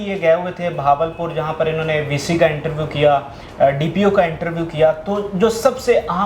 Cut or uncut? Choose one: uncut